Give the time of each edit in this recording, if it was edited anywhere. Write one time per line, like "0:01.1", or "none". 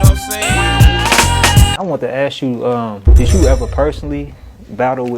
0:01.7